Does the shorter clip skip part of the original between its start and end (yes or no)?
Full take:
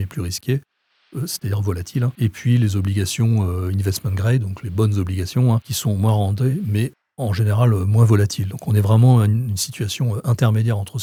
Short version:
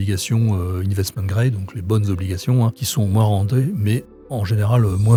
no